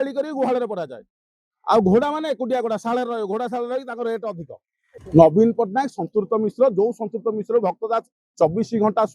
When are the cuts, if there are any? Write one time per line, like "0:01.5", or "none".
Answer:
0:05.0